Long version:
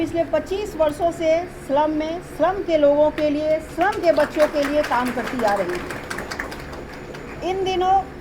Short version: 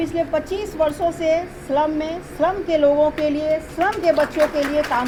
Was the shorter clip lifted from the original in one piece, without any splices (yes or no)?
yes